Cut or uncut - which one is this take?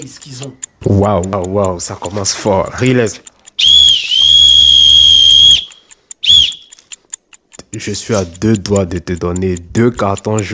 cut